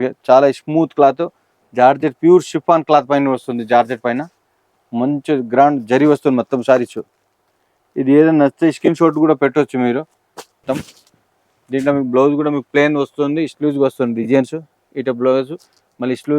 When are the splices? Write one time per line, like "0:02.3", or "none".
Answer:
0:10.6